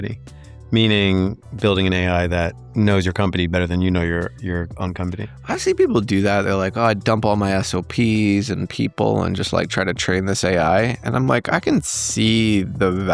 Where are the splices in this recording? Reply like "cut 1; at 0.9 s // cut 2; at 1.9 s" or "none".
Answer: cut 1; at 2.6 s